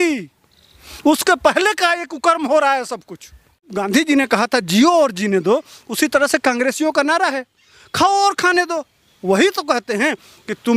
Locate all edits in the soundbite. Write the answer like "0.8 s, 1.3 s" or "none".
3.7 s